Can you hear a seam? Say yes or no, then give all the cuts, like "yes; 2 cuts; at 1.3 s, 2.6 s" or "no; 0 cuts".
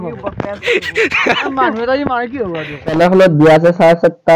yes; 1 cut; at 3.0 s